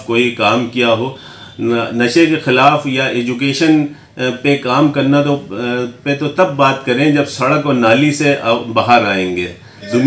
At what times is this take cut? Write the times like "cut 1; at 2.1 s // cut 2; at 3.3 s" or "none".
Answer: none